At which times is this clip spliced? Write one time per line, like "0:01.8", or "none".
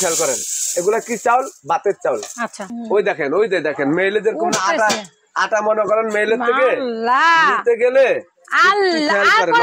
0:02.6